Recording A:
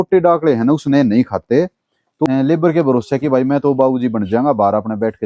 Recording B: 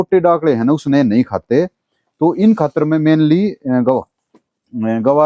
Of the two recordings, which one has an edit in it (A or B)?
A